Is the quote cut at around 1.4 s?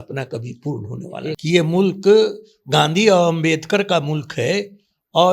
yes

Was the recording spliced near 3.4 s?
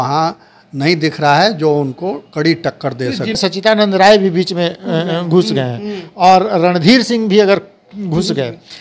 yes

